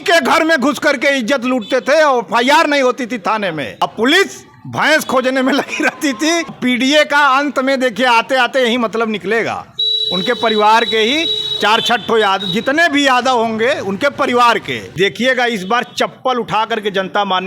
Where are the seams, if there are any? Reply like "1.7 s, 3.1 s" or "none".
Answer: 3.8 s, 6.6 s, 14.9 s

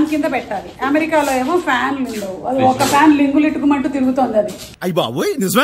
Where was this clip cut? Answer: 4.6 s

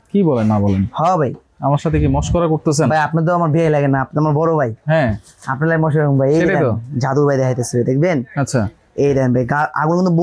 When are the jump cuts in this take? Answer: none

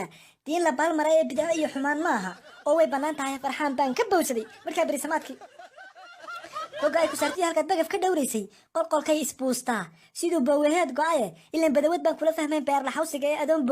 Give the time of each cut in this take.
5.5 s

